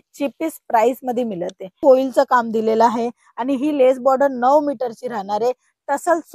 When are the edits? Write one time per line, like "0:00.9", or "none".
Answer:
0:01.8